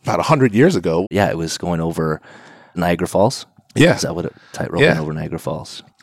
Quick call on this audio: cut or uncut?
cut